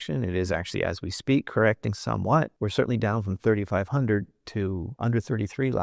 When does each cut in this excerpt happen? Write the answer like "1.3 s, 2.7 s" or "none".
2.6 s, 4.9 s